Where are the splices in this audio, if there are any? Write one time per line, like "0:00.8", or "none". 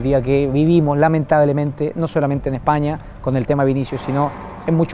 none